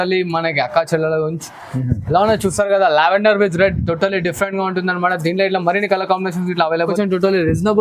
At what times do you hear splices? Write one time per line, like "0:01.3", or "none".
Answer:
0:06.9